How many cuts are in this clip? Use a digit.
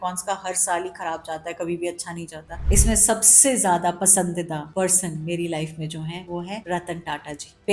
1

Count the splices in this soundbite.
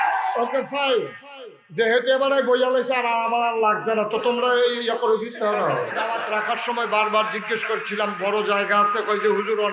1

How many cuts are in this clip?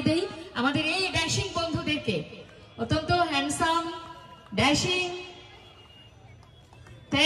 0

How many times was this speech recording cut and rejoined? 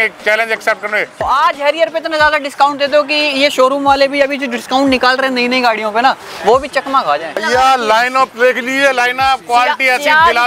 2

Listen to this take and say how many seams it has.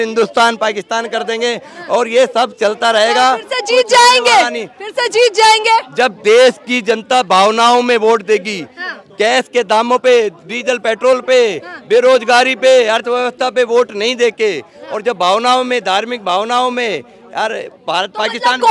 0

